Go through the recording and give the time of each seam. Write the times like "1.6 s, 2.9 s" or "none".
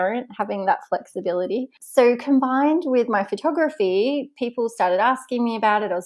1.8 s